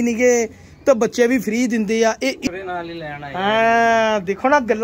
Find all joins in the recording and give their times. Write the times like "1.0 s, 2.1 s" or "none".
2.5 s